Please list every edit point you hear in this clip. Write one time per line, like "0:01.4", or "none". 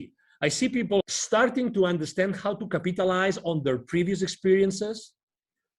0:01.0